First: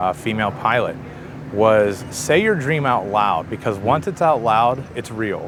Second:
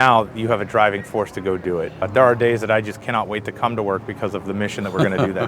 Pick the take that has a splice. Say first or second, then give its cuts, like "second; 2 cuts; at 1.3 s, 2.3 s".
second; 1 cut; at 2.1 s